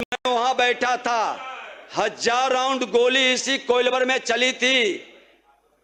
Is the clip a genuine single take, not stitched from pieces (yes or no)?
yes